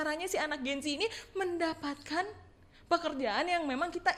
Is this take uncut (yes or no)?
yes